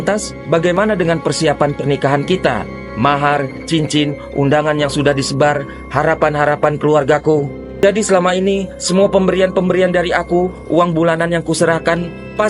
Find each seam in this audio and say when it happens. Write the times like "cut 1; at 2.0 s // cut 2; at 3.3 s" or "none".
cut 1; at 7.6 s